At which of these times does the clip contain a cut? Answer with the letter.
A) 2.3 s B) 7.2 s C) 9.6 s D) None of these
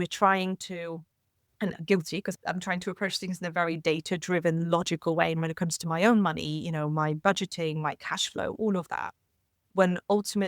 A